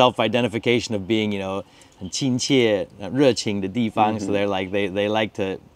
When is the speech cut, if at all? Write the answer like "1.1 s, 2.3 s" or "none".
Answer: none